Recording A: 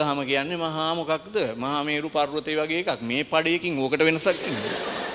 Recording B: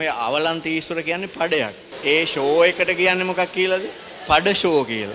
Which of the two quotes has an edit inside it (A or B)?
B